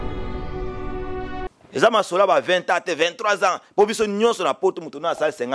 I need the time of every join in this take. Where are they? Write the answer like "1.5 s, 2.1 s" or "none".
1.5 s